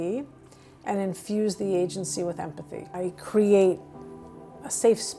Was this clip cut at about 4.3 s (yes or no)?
no